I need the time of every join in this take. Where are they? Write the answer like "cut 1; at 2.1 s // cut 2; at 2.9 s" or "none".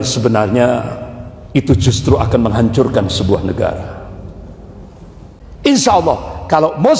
cut 1; at 5.3 s